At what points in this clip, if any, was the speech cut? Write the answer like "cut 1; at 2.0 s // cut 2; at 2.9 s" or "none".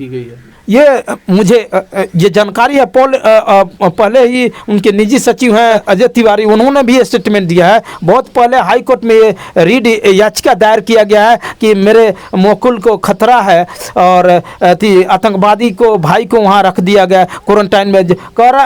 cut 1; at 5.8 s